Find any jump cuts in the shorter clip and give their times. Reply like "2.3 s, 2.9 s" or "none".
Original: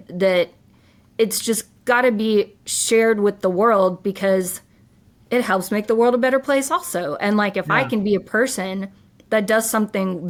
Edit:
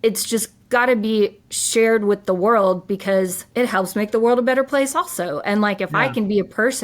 3.4 s